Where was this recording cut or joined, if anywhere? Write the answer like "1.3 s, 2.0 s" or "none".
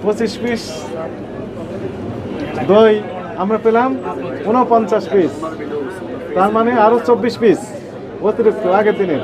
none